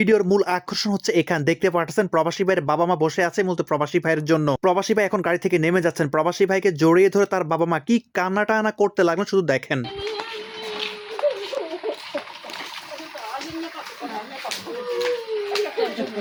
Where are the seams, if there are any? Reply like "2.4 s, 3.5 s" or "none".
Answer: none